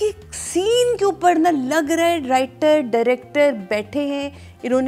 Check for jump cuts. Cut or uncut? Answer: uncut